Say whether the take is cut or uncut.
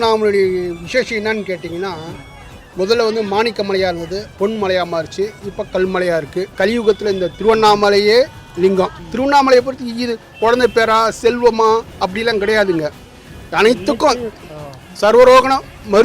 cut